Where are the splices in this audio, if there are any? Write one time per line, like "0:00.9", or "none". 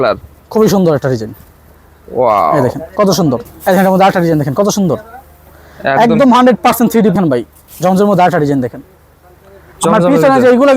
0:03.5
0:07.1